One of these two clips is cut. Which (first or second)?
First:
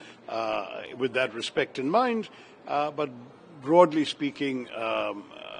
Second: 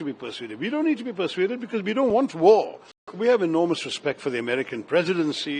second